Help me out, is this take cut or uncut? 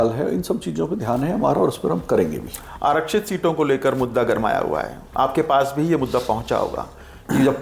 uncut